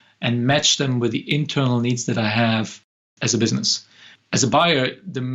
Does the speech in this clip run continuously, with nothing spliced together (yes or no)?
no